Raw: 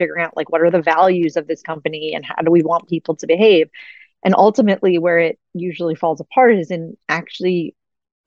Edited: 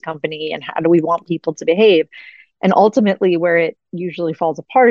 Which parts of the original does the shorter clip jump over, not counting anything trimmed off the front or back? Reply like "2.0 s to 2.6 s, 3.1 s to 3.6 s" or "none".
none